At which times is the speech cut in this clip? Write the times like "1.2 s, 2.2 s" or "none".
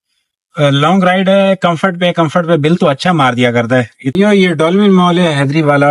4.1 s